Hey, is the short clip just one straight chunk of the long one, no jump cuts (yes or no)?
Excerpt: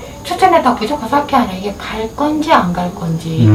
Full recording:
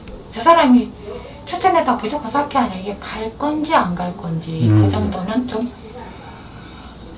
yes